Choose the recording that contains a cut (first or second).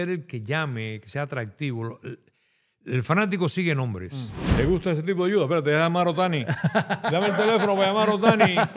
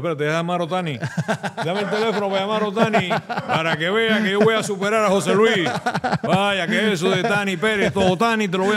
first